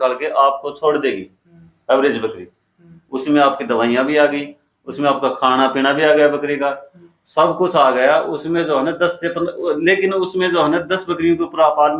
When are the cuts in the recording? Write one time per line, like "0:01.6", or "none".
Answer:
none

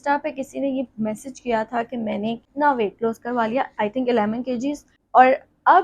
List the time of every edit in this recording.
0:02.5
0:04.9

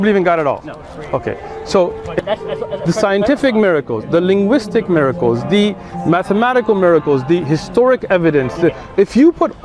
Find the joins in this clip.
0:02.2

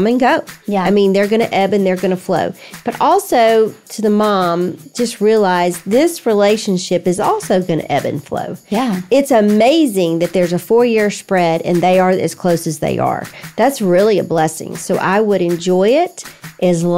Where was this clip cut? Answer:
none

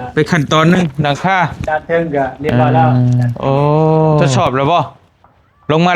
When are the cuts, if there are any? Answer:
0:04.3

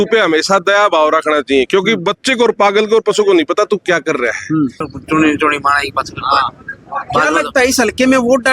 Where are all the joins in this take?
0:04.9

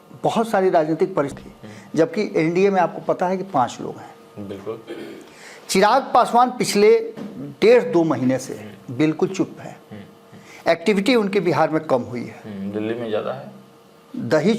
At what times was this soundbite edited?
0:01.4

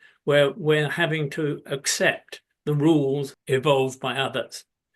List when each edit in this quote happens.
0:03.3

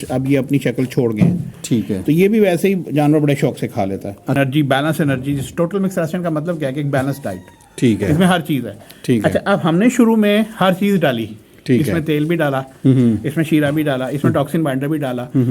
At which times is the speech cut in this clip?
0:04.4

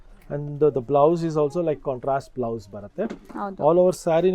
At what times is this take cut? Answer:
none

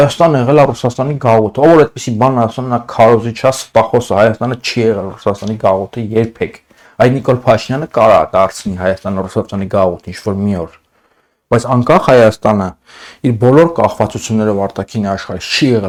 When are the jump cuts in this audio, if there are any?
none

